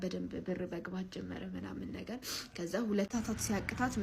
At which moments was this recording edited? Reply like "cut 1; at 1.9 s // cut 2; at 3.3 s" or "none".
cut 1; at 3.1 s